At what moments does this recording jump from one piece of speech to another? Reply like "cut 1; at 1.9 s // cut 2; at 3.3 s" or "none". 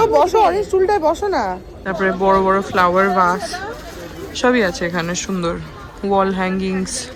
cut 1; at 1.7 s

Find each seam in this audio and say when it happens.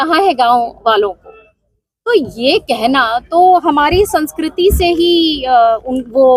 none

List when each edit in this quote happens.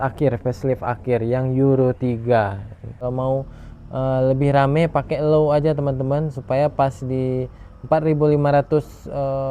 cut 1; at 3.0 s

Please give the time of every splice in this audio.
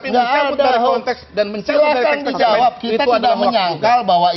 none

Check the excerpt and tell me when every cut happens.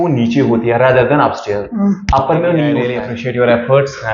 cut 1; at 3.0 s

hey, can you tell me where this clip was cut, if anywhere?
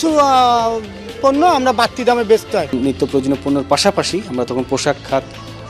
cut 1; at 2.7 s

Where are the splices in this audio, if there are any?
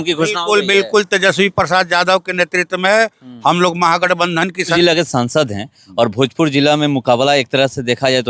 cut 1; at 4.7 s

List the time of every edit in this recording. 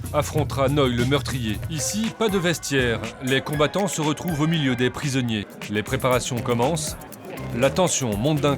cut 1; at 1.7 s // cut 2; at 5.6 s

